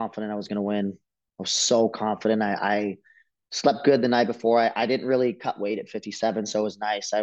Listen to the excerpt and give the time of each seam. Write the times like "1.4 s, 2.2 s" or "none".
none